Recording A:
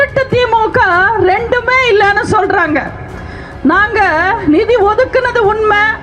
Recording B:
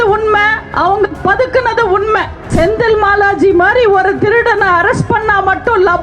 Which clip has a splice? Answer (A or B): B